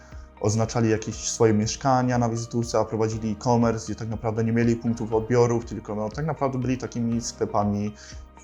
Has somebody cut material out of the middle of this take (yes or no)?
no